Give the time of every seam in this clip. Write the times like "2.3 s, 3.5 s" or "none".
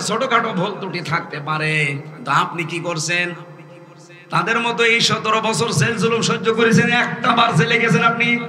none